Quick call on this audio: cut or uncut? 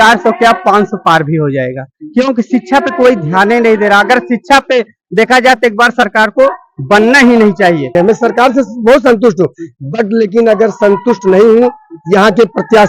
cut